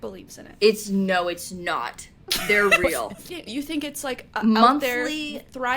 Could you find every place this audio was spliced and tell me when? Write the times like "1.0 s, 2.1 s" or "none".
3.4 s